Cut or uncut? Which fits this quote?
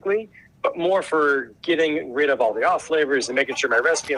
uncut